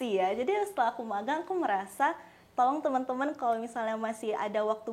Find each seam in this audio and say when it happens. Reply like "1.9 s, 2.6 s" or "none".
none